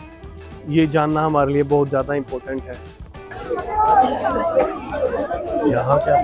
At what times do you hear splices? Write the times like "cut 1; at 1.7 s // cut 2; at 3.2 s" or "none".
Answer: cut 1; at 3.2 s